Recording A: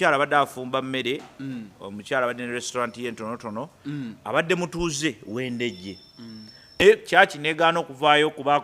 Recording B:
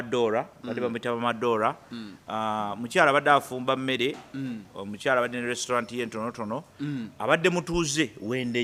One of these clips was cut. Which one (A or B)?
A